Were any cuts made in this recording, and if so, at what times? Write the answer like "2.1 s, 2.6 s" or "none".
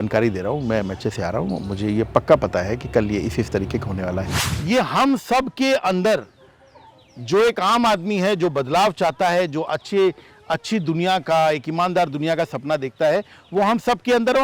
4.4 s